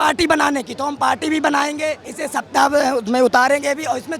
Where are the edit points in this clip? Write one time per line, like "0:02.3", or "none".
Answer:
0:02.1